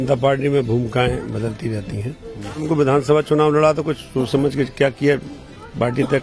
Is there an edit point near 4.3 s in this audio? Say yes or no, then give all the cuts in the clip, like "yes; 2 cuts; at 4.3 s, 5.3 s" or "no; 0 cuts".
no; 1 cut; at 2.6 s